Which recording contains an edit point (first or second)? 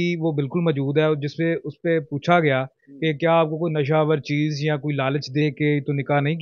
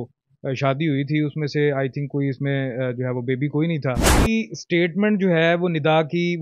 second